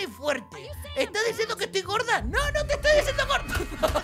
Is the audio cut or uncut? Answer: uncut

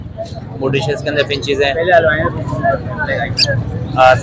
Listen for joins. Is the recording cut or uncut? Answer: uncut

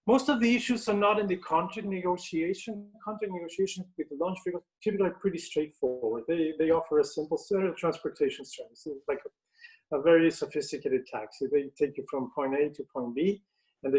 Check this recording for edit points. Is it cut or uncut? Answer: uncut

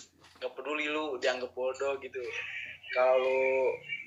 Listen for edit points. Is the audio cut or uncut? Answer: uncut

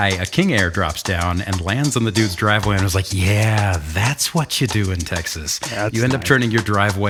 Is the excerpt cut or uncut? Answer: uncut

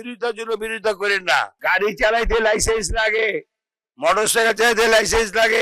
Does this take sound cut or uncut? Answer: cut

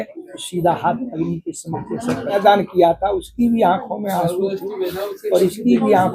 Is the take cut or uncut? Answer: cut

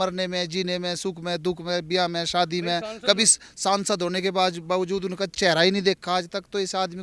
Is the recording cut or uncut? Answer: uncut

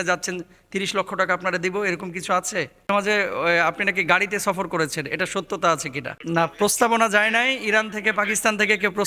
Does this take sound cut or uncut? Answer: cut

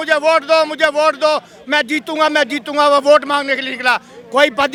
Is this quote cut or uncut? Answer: uncut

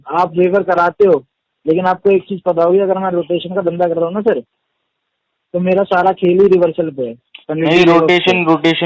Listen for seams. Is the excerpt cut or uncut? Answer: uncut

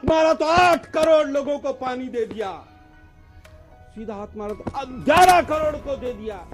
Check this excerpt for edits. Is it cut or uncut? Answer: uncut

